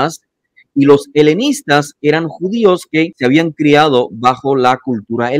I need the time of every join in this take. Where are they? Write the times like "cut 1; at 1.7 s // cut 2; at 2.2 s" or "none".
cut 1; at 3.1 s